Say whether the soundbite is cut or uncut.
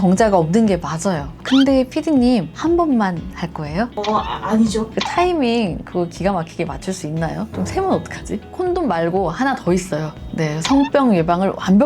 cut